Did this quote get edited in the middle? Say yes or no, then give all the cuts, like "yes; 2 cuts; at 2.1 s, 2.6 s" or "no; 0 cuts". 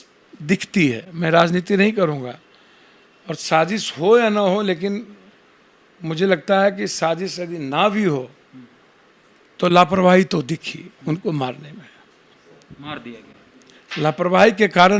no; 0 cuts